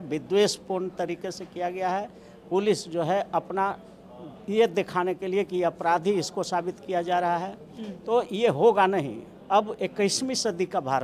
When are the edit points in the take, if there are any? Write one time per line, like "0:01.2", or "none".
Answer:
none